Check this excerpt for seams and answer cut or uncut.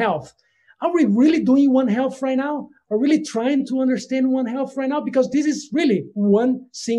uncut